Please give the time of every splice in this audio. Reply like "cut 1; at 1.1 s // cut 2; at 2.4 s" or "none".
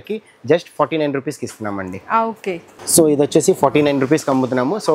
cut 1; at 2.7 s